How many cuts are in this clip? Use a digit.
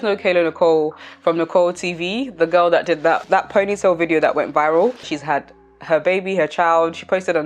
1